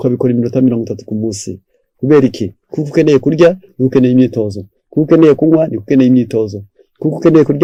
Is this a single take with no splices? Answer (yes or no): yes